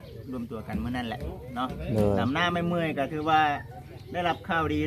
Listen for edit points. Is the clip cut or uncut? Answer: uncut